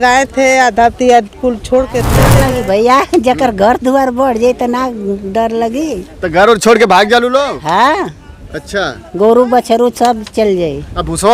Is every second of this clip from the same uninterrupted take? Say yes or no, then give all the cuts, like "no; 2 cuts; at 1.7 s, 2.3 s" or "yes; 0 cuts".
no; 1 cut; at 2.3 s